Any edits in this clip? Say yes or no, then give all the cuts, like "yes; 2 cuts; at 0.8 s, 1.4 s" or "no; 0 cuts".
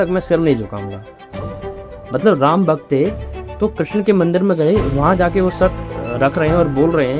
no; 0 cuts